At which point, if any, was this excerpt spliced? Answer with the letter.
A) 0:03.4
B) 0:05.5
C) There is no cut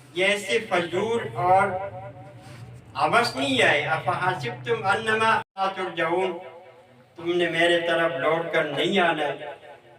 B